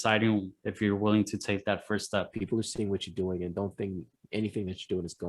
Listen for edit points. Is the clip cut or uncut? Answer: cut